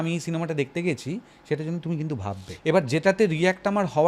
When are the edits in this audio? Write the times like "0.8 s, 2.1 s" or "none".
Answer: 2.5 s